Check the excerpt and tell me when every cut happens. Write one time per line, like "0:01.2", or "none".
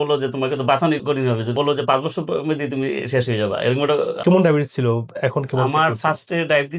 0:01.5
0:04.2